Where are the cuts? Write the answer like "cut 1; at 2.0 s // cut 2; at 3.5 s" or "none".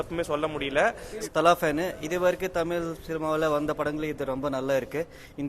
cut 1; at 1.3 s